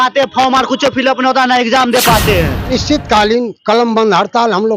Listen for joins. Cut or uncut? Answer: cut